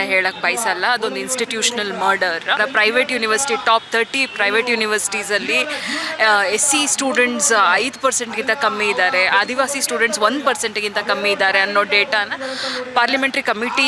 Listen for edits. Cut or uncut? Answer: cut